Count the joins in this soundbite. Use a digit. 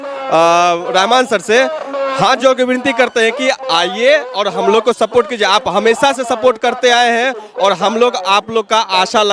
0